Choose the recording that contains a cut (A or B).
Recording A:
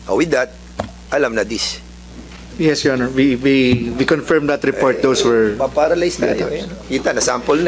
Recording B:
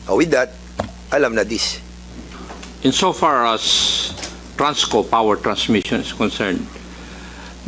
B